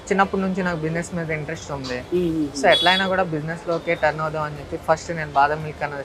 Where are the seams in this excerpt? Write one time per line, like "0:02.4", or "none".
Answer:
none